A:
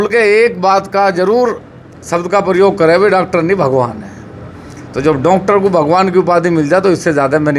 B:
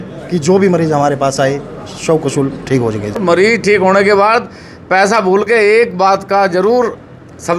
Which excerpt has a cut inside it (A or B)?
B